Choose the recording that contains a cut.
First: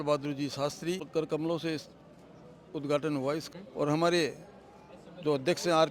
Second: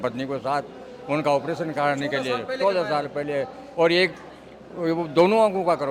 first; 2 cuts; at 1.1 s, 3.4 s

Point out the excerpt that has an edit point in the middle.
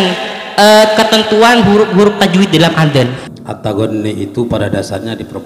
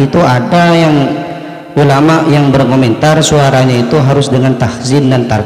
first; 1 cut; at 3.2 s

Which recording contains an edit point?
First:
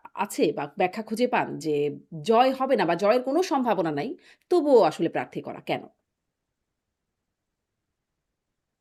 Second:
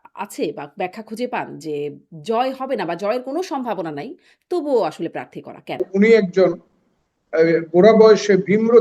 second; 1 cut; at 5.9 s

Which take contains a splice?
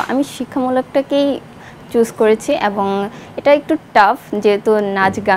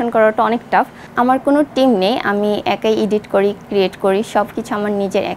second; 1 cut; at 1.0 s

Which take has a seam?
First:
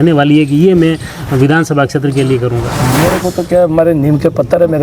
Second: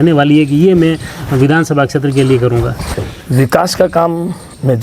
first; 1 cut; at 2.8 s

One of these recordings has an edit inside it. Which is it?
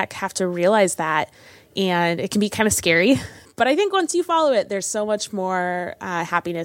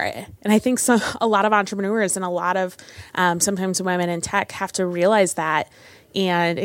first; 1 cut; at 3.4 s

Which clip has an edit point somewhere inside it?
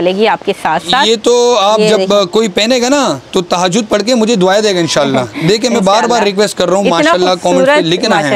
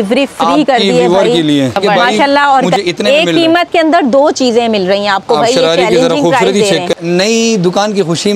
second; 2 cuts; at 2.8 s, 6.9 s

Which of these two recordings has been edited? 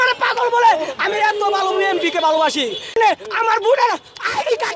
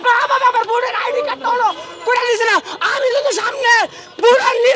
first; 1 cut; at 3.0 s

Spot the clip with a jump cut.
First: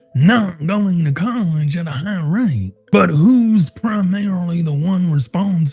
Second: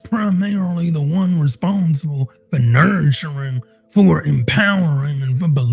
first; 1 cut; at 2.7 s

